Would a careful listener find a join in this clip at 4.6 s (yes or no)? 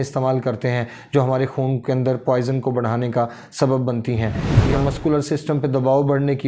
yes